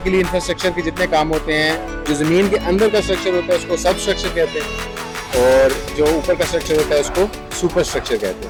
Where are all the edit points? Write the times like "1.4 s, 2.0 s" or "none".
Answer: none